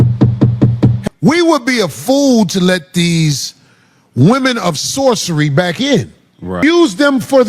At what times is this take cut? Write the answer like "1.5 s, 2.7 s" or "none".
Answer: 1.0 s, 6.6 s